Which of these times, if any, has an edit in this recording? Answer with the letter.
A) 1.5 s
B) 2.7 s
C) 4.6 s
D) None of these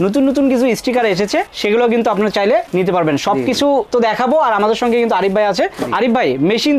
D